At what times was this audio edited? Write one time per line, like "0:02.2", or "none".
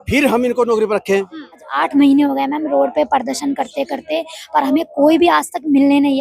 0:01.7